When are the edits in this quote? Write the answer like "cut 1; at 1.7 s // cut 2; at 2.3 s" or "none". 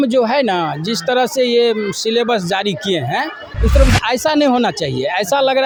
none